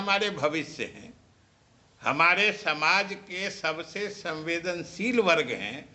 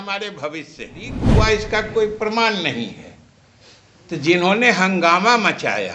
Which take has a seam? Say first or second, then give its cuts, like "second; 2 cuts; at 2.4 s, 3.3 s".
second; 1 cut; at 1.2 s